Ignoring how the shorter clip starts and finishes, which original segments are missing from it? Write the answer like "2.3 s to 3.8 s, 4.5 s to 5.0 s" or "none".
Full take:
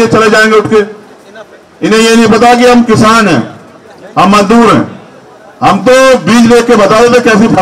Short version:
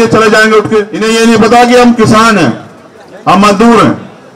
0.9 s to 1.8 s